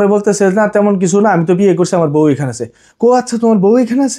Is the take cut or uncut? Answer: uncut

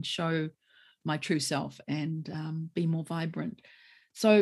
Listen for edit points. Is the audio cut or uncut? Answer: uncut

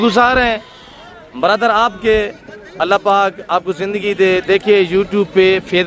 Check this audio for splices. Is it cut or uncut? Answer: uncut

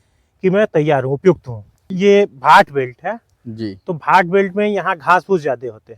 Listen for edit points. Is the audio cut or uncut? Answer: cut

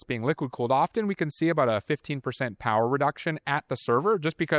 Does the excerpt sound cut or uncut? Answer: uncut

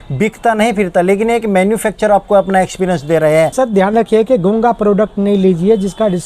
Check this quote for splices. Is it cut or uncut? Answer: cut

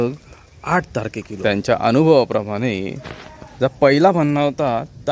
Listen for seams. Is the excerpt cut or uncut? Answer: cut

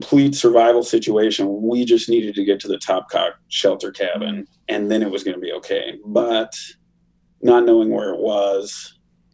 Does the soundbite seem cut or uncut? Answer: cut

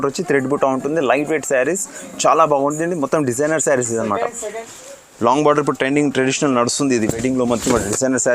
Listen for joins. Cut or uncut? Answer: cut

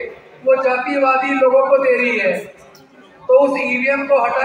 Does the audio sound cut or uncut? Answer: uncut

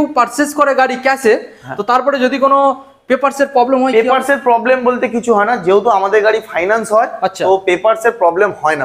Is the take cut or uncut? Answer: uncut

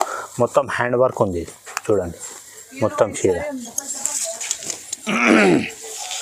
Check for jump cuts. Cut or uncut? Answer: uncut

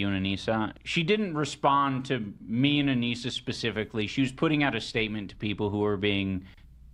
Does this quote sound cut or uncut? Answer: uncut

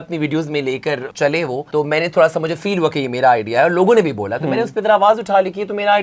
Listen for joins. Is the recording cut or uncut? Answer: cut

